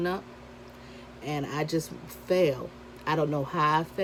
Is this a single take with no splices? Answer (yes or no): yes